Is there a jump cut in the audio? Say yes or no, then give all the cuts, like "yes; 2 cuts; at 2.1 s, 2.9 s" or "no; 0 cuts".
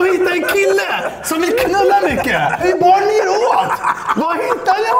yes; 1 cut; at 2.6 s